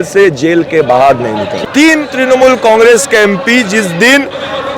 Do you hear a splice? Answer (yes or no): yes